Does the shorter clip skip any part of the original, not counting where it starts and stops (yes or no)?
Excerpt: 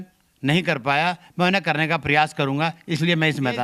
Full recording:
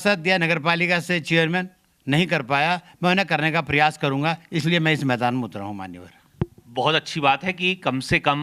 no